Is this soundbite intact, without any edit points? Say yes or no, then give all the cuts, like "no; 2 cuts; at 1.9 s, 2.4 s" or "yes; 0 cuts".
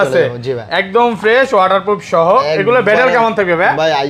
yes; 0 cuts